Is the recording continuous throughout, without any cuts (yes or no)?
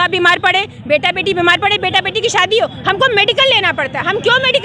yes